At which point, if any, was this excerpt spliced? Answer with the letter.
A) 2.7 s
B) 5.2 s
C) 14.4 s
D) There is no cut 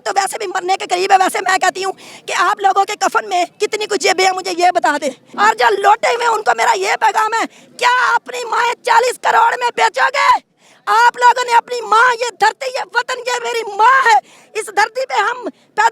B